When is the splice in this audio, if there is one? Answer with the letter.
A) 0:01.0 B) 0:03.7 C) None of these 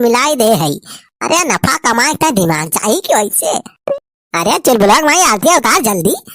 B